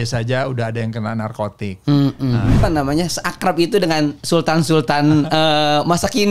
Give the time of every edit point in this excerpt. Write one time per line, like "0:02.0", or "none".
0:02.6